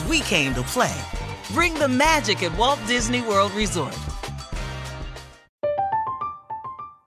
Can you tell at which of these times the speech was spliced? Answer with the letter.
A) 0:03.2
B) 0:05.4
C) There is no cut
B